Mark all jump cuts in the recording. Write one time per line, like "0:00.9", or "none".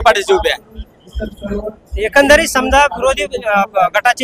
none